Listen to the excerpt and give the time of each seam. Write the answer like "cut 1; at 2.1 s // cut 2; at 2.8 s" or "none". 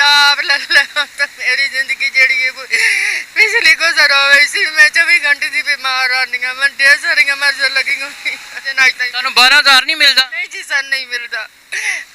cut 1; at 8.7 s